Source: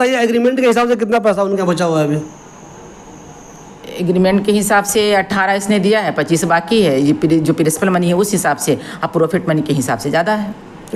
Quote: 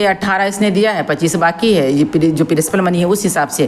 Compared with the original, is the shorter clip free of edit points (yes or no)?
yes